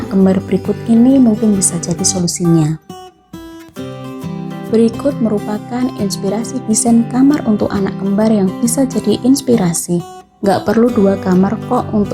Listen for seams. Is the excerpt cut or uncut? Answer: cut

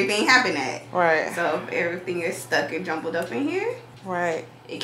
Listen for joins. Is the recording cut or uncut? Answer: cut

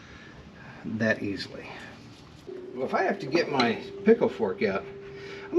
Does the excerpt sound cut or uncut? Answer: cut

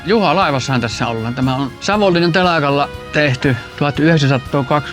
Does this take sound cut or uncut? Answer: cut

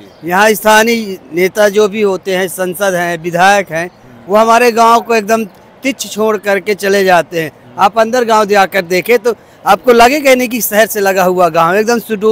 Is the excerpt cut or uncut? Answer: uncut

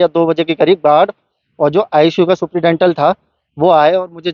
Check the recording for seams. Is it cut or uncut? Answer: uncut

